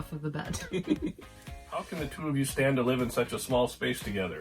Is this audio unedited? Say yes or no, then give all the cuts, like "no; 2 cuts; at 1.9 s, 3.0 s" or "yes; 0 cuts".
no; 1 cut; at 1.9 s